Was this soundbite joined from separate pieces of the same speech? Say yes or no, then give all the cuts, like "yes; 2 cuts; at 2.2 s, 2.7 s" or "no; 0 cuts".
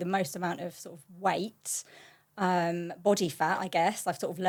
no; 0 cuts